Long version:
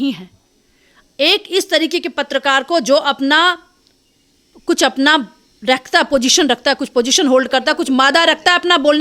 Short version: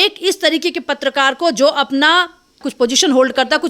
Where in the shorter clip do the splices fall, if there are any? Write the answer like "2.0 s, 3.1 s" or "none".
2.7 s